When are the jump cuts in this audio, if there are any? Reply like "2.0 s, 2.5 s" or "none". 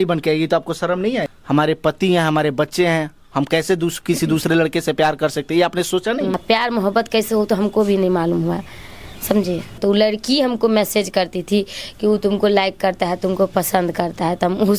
1.3 s, 6.4 s, 9.8 s